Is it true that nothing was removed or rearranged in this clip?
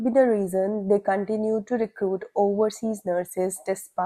yes; 0 cuts

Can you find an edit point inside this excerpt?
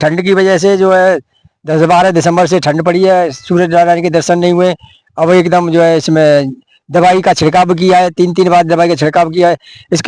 no; 0 cuts

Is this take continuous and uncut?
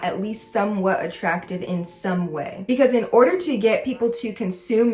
yes; 0 cuts

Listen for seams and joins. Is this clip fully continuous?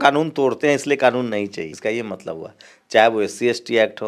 yes; 0 cuts

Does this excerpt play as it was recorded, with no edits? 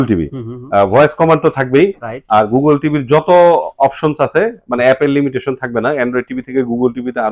yes; 0 cuts

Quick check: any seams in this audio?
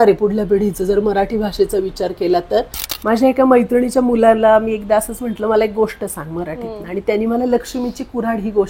yes; 1 cut; at 2.8 s

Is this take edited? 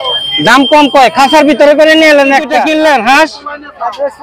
yes; 1 cut; at 2.7 s

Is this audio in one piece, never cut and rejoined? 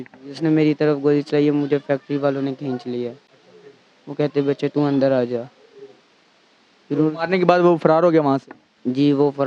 yes; 0 cuts

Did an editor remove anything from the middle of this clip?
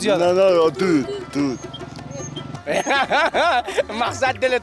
yes; 1 cut; at 2.5 s

